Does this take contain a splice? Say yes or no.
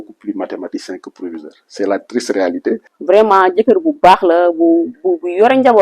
yes